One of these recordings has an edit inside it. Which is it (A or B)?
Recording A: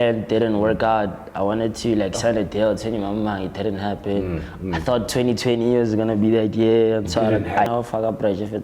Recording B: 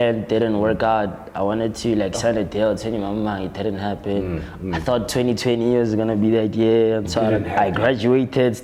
A